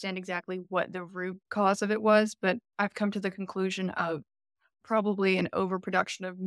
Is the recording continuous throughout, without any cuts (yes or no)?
no